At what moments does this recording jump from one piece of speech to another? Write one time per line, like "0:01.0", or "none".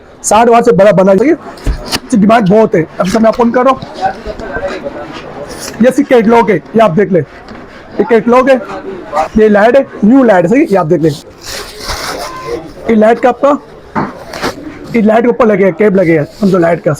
0:01.2
0:09.3
0:11.3